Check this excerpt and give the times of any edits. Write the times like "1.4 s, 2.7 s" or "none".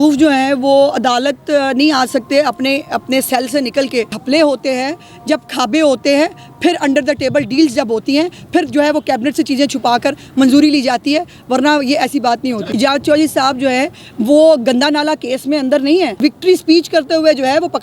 4.2 s, 12.6 s, 16.1 s